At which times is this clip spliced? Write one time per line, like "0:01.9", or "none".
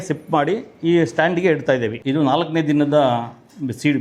0:02.0